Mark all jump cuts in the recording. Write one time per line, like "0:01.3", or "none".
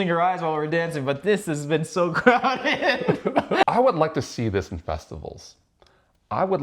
0:03.6